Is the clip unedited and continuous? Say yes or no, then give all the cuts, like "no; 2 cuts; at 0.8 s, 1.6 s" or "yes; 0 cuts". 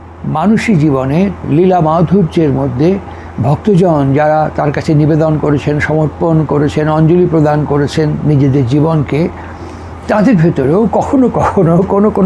yes; 0 cuts